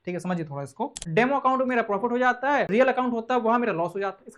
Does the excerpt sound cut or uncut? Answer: cut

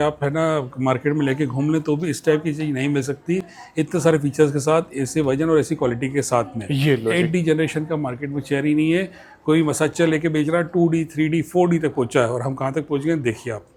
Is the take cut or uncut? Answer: uncut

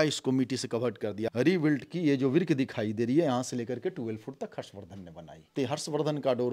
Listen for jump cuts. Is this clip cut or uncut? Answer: cut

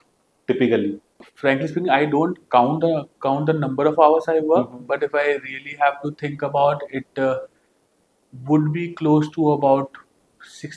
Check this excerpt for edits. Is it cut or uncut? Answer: cut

